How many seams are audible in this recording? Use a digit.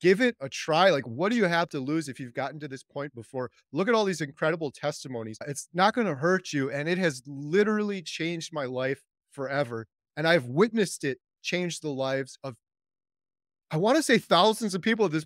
1